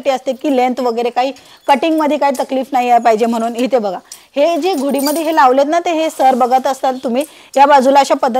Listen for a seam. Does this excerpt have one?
no; 0 cuts

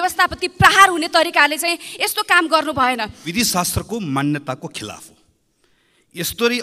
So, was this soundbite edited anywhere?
yes; 1 cut; at 3.3 s

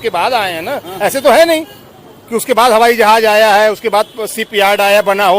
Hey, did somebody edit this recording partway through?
no; 0 cuts

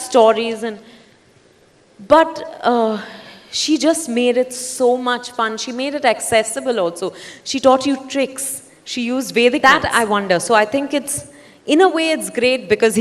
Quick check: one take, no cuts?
no; 1 cut; at 9.6 s

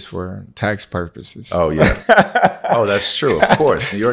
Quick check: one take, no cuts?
yes; 0 cuts

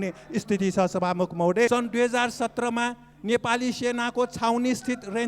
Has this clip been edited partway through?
yes; 1 cut; at 1.7 s

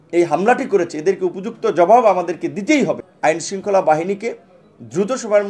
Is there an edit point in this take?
yes; 1 cut; at 3.0 s

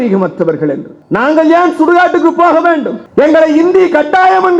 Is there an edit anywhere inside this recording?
yes; 1 cut; at 1.0 s

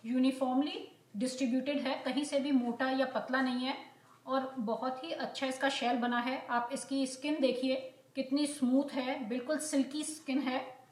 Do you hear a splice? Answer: no; 0 cuts

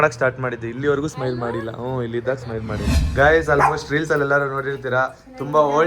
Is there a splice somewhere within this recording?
yes; 1 cut; at 3.0 s

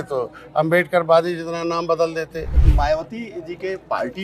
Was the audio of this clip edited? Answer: yes; 1 cut; at 2.5 s

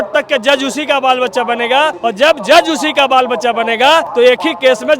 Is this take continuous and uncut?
no; 2 cuts; at 2.0 s, 4.1 s

